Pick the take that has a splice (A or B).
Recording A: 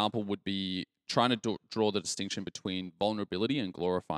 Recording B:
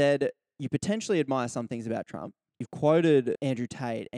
B